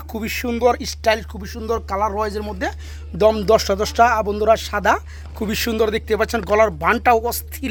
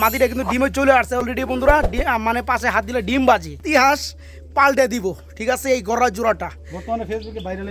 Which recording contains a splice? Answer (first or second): second